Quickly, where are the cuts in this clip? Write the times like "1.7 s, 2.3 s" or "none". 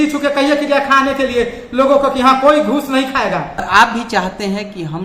3.7 s